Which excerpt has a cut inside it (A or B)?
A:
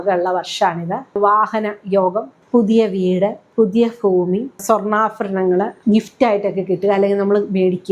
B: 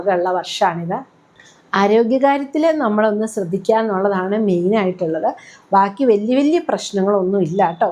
A